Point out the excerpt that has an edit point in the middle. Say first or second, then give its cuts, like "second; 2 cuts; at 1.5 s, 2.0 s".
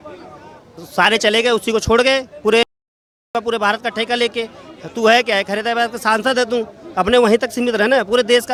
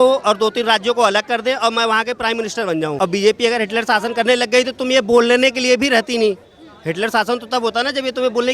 second; 1 cut; at 2.9 s